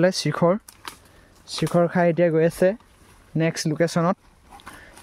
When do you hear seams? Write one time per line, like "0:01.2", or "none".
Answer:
none